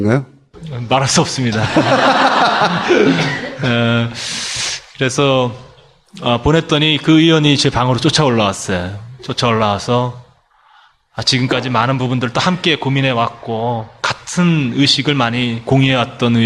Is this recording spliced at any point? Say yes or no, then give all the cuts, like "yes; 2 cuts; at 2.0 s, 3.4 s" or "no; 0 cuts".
no; 0 cuts